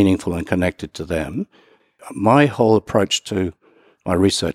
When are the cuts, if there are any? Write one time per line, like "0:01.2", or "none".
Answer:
0:01.9